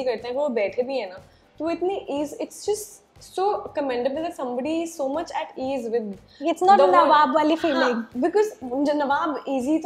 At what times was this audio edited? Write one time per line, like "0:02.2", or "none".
none